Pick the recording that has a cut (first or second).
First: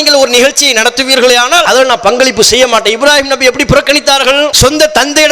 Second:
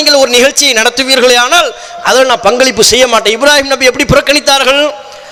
first